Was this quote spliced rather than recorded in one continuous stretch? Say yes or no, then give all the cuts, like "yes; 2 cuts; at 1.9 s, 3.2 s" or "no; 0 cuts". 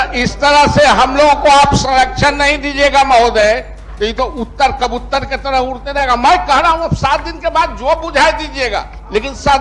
no; 0 cuts